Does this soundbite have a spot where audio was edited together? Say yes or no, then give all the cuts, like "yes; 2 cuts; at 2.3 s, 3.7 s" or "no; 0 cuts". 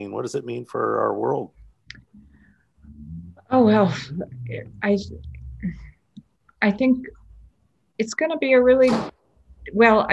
yes; 1 cut; at 1.7 s